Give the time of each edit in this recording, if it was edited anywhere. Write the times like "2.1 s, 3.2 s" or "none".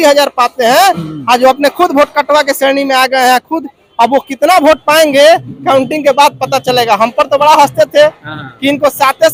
none